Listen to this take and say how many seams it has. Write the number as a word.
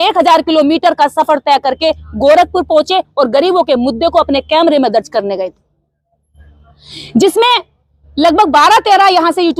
zero